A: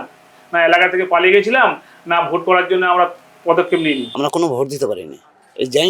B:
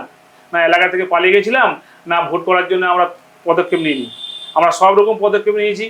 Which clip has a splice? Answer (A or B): A